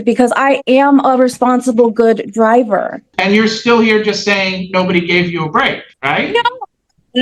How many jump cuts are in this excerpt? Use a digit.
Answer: 2